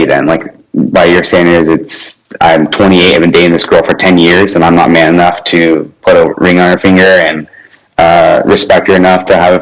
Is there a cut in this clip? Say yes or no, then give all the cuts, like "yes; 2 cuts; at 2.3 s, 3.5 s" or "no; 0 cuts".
no; 0 cuts